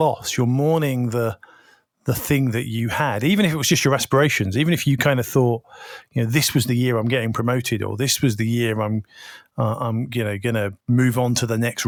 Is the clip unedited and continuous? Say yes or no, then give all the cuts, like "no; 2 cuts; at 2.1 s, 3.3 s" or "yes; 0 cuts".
yes; 0 cuts